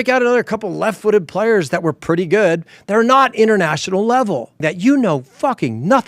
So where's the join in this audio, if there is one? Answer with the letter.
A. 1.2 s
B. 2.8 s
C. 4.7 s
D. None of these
C